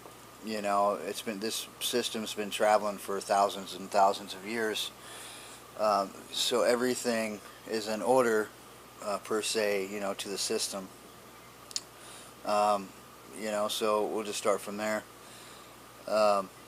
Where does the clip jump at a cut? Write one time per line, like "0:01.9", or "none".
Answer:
0:14.3

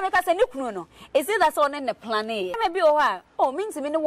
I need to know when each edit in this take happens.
0:02.6

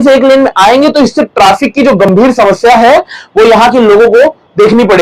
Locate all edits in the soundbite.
none

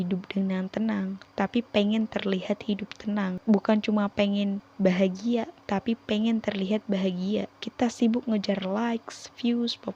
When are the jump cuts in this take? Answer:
0:03.4
0:04.7
0:07.6

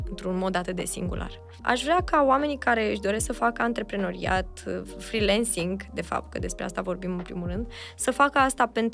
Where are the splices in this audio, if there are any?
0:01.6

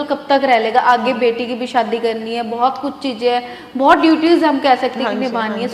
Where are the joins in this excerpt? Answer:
none

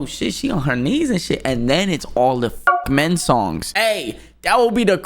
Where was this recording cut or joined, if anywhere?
0:03.6

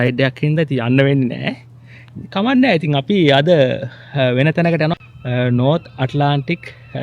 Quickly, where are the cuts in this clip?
0:04.9

